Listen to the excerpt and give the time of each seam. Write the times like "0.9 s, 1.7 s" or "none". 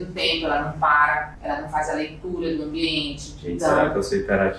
1.3 s